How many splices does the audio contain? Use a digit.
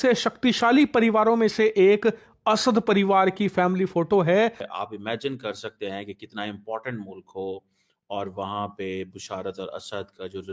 1